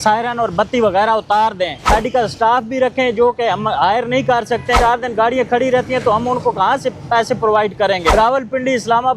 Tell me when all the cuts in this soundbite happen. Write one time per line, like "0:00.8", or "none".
0:01.8
0:04.8
0:08.0

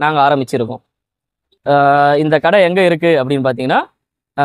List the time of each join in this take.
0:01.0

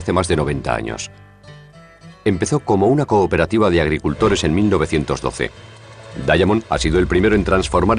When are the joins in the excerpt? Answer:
0:01.6

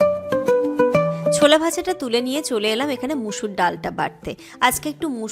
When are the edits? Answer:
0:01.4

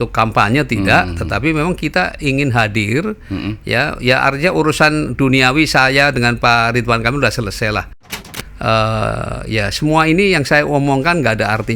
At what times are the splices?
0:08.1

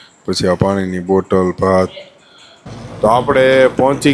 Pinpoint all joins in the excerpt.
0:02.7

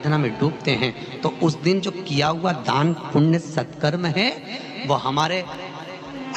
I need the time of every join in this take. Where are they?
none

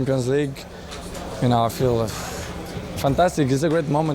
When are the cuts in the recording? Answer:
none

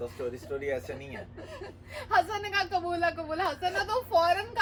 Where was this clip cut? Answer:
none

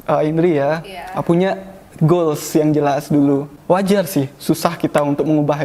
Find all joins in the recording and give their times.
0:03.5

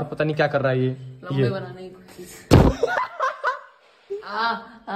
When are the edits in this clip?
0:04.0

